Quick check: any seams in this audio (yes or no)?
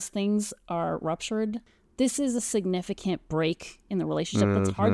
yes